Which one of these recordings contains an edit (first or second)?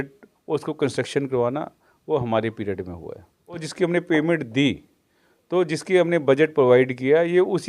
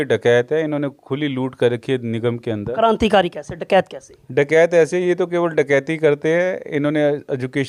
first